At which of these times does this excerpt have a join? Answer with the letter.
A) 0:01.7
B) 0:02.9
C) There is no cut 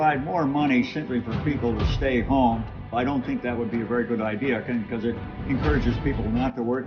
B